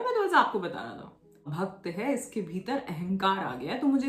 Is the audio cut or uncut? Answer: cut